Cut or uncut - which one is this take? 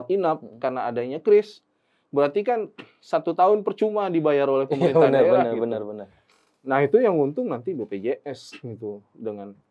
uncut